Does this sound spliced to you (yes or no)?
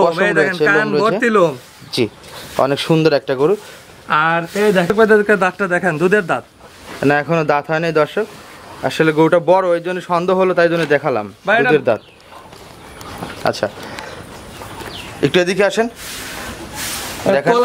yes